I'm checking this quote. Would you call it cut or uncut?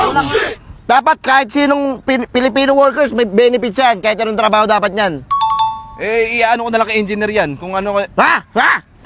uncut